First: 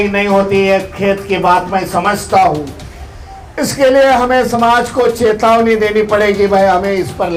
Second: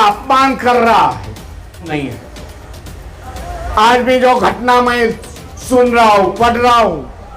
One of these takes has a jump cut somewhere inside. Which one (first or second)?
second